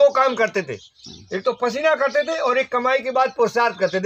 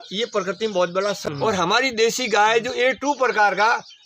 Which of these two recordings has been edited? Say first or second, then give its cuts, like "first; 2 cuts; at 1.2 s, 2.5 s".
second; 1 cut; at 1.3 s